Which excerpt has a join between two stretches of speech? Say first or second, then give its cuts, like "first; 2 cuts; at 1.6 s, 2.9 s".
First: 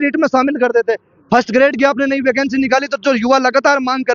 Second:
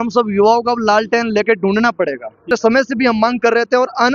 second; 1 cut; at 2.4 s